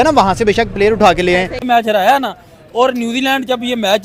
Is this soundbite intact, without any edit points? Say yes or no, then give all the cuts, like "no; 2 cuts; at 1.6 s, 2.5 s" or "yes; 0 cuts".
yes; 0 cuts